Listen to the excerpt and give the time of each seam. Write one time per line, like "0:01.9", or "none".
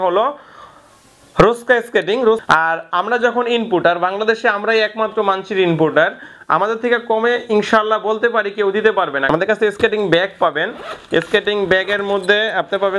0:02.4
0:09.3